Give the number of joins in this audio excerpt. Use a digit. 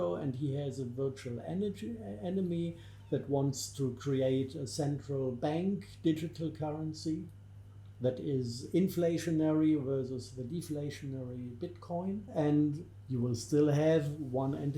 1